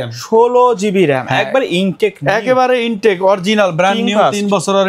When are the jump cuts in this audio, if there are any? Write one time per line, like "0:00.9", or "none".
none